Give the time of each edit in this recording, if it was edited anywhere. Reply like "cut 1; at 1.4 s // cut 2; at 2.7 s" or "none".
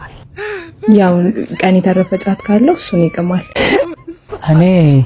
cut 1; at 3.7 s